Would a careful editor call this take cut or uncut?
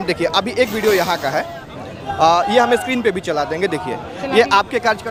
uncut